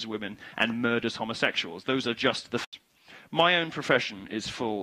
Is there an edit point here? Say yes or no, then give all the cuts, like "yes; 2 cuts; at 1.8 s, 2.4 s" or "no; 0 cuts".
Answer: no; 0 cuts